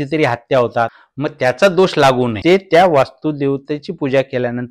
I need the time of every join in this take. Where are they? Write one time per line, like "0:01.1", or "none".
0:01.0
0:02.4